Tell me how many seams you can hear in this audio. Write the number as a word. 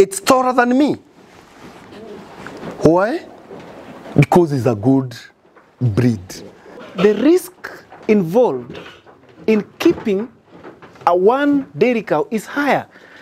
one